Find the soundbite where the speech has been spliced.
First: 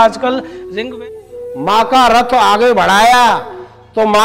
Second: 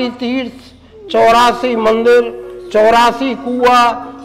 first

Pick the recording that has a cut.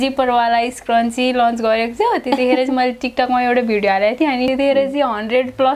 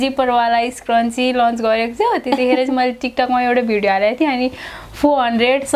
first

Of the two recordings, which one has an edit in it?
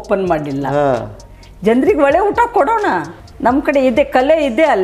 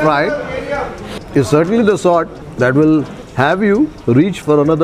first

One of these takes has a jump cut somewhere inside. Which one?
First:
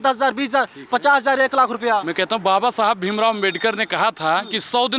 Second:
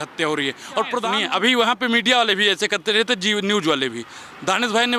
second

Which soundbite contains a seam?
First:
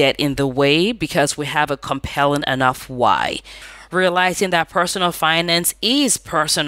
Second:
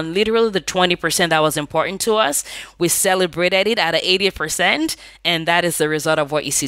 first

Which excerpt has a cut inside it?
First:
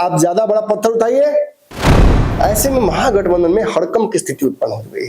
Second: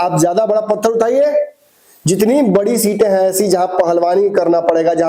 first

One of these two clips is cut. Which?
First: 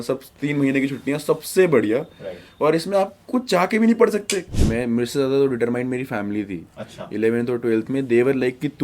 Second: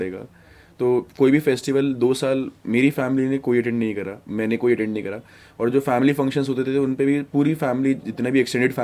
first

